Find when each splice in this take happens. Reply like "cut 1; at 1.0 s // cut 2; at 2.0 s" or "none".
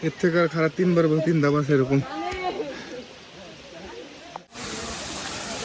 cut 1; at 4.6 s